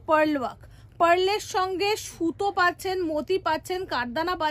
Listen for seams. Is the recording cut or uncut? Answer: uncut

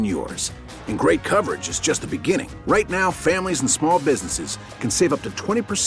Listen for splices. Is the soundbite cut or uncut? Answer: uncut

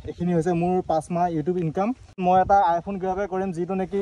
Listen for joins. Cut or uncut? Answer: cut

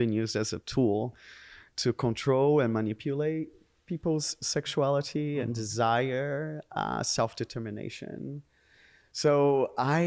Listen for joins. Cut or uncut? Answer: uncut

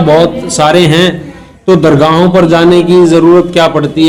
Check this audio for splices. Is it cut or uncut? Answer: uncut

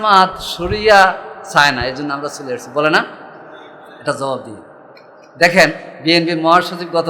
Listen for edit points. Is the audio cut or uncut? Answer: cut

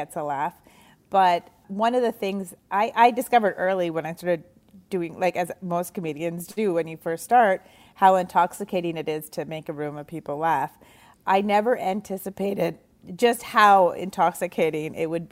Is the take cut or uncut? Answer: cut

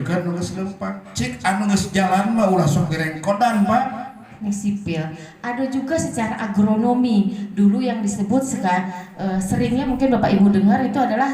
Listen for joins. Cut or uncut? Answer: cut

